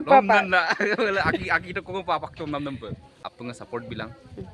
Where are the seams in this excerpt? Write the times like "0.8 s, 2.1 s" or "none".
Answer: 3.1 s